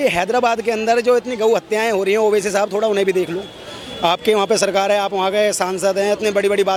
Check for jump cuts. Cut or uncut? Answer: uncut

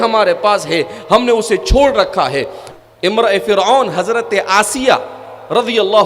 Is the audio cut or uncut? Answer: cut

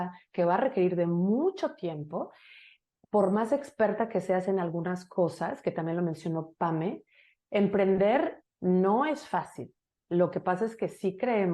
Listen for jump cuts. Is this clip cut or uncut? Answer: uncut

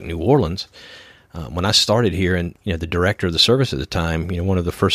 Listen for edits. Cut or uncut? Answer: cut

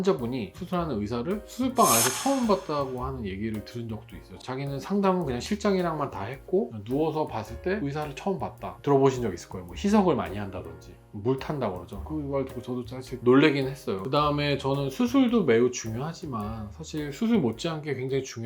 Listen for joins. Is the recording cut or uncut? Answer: cut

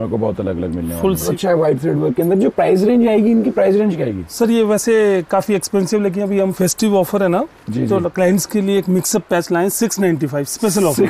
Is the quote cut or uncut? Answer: cut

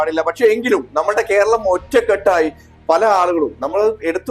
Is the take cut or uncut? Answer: cut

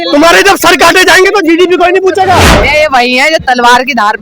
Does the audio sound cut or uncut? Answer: cut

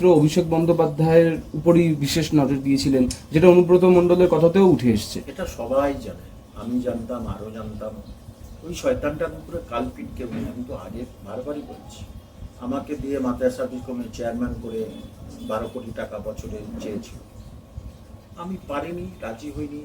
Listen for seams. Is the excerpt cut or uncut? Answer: uncut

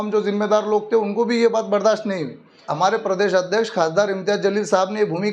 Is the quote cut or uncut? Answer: cut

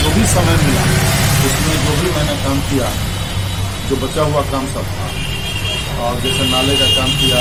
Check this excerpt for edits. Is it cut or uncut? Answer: uncut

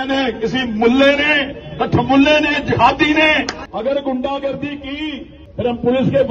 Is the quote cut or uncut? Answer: cut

